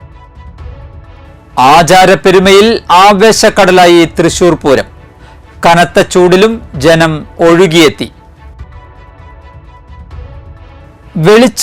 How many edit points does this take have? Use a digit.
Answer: 1